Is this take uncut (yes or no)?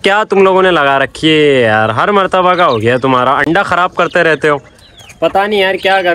yes